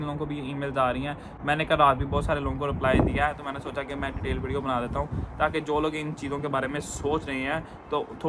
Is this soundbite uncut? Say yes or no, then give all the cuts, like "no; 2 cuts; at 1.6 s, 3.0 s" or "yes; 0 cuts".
yes; 0 cuts